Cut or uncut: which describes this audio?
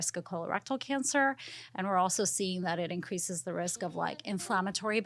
uncut